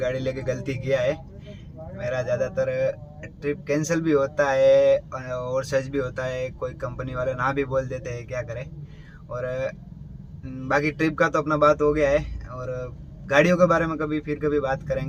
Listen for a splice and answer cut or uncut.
uncut